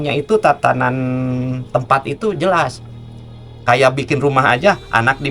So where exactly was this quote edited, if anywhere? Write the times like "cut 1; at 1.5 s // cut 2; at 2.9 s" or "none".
none